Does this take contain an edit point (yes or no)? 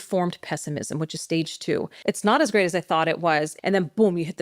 yes